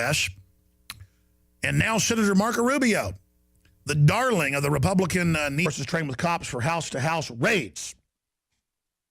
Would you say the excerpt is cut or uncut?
uncut